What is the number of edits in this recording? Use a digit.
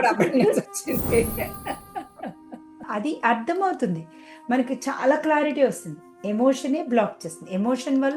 1